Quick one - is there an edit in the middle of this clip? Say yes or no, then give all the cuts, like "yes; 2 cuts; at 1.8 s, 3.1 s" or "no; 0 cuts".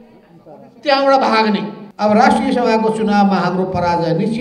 yes; 1 cut; at 1.8 s